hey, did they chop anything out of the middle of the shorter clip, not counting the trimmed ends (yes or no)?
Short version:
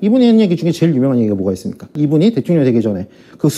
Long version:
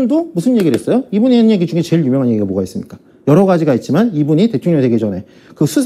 yes